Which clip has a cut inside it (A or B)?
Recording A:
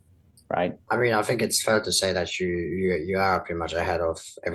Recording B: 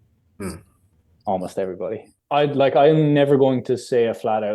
B